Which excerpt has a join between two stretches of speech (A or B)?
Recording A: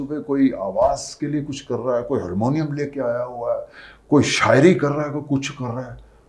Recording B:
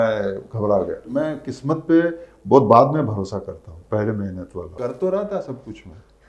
B